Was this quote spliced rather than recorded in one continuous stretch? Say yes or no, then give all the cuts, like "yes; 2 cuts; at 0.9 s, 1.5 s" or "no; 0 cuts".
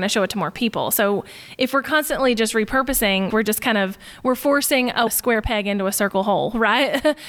yes; 2 cuts; at 3.3 s, 5.1 s